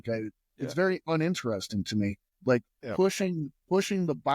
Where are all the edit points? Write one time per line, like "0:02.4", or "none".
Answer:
0:02.3